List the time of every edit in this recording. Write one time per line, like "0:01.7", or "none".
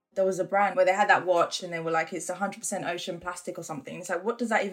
0:00.7
0:01.6